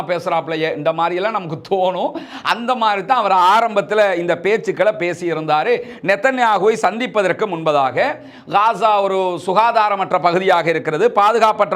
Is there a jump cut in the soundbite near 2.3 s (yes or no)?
no